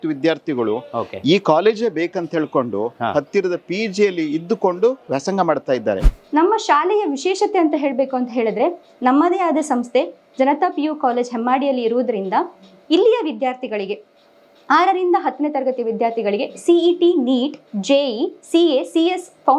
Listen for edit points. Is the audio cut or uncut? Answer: cut